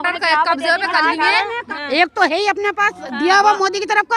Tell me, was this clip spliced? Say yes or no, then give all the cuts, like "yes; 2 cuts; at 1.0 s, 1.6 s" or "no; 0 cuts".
yes; 1 cut; at 1.6 s